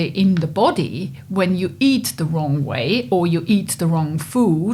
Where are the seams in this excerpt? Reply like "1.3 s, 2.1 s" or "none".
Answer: none